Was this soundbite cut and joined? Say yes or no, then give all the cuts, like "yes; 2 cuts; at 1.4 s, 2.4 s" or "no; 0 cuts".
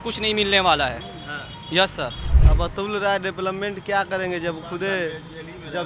yes; 1 cut; at 2.3 s